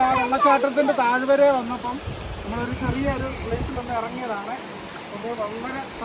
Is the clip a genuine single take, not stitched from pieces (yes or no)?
yes